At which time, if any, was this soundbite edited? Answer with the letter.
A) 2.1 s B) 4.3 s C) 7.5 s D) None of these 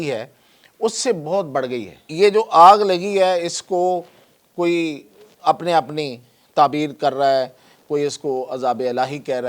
A